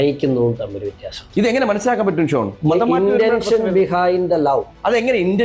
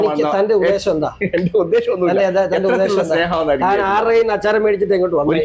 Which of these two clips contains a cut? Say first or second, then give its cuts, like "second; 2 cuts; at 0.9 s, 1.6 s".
first; 1 cut; at 2.6 s